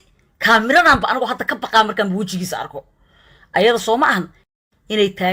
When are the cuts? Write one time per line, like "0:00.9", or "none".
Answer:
none